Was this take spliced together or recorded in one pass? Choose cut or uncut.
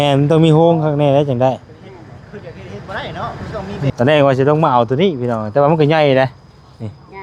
cut